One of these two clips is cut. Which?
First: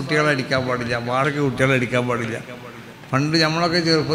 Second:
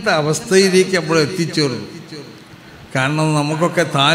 first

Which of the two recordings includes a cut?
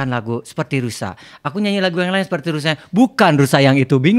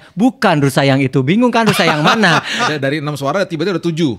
second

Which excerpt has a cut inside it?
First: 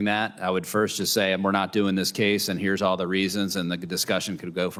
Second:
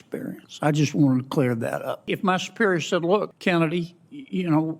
second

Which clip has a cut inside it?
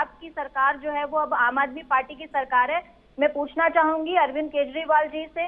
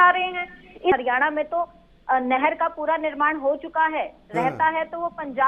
second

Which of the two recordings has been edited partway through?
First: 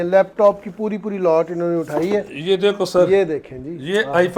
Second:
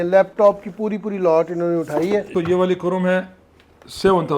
second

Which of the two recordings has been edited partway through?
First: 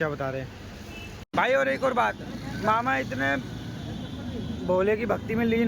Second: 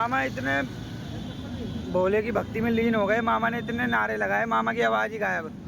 first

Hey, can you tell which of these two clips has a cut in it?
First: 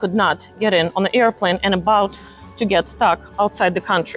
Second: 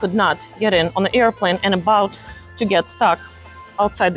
first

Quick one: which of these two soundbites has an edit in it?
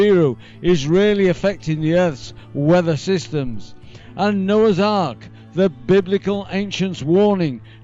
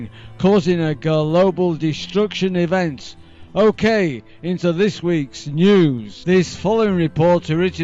second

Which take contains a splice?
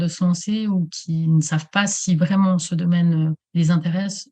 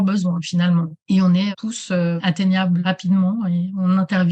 second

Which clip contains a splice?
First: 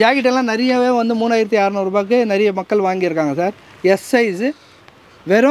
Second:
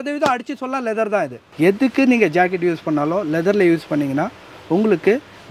second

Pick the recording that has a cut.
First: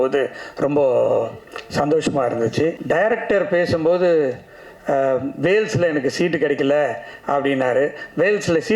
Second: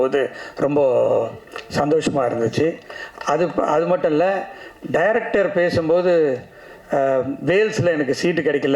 first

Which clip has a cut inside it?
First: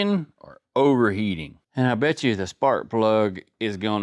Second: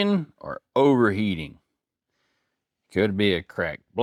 first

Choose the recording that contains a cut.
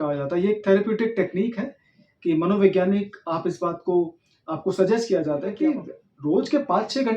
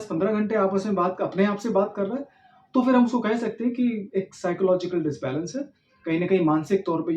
first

